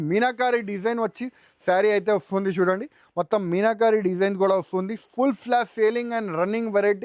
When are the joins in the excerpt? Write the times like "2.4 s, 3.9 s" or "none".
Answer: none